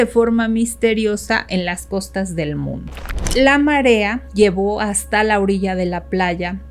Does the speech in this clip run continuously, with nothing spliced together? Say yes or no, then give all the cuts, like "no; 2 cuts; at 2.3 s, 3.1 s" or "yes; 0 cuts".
no; 2 cuts; at 3.3 s, 4.2 s